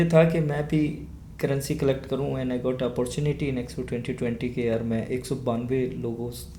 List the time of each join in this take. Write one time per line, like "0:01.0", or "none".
none